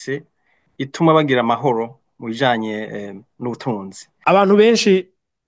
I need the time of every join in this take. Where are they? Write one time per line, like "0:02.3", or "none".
0:04.1